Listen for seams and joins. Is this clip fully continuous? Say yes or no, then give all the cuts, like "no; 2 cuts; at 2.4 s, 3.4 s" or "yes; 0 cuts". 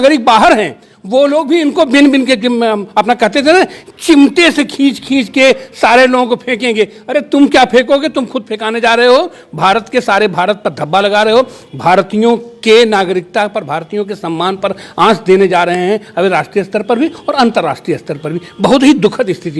yes; 0 cuts